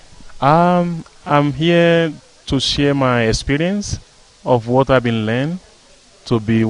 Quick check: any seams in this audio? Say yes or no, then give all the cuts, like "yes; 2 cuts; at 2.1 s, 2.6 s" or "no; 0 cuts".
yes; 1 cut; at 2.0 s